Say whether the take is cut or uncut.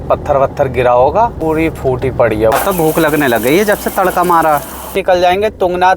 cut